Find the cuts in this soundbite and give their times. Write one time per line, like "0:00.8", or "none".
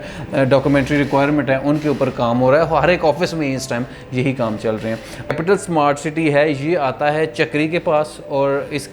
0:05.3